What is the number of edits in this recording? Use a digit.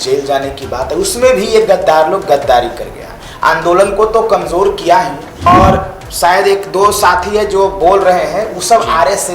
1